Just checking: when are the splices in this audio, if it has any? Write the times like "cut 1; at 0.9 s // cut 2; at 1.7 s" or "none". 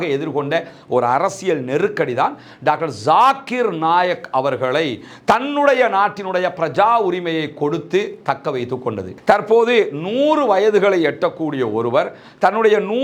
cut 1; at 9.1 s